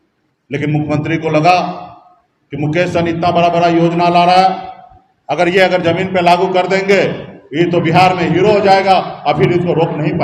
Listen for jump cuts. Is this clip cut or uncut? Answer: uncut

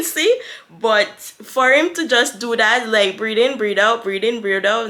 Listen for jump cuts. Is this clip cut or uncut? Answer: uncut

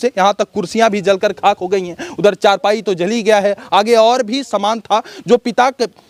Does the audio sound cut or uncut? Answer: uncut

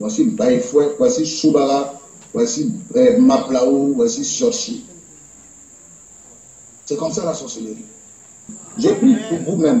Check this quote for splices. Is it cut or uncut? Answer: cut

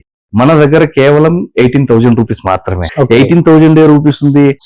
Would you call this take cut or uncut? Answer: cut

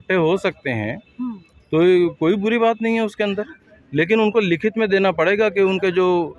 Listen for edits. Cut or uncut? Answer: uncut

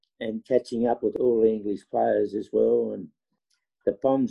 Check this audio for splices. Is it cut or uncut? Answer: cut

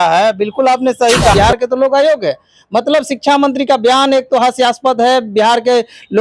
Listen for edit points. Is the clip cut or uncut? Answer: cut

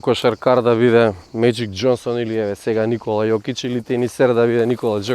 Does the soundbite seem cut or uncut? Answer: uncut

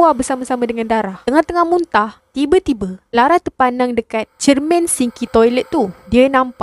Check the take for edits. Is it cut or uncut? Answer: uncut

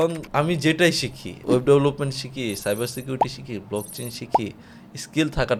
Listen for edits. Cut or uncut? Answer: uncut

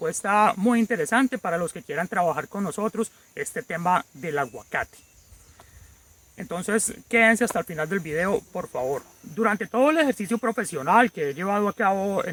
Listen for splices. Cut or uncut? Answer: uncut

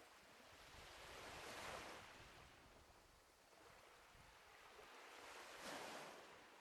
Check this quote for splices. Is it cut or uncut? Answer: uncut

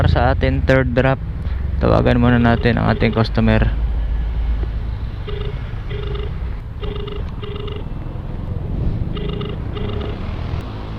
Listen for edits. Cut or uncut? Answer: uncut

